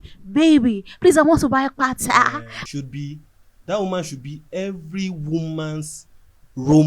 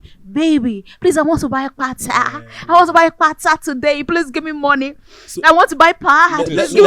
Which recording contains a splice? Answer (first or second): first